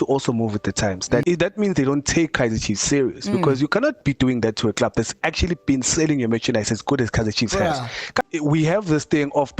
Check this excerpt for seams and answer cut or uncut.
cut